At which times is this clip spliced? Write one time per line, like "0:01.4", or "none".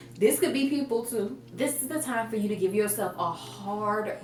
none